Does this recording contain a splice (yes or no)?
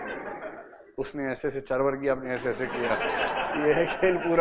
no